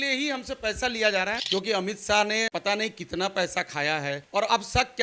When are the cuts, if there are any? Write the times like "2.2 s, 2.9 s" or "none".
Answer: 1.4 s, 2.5 s, 4.2 s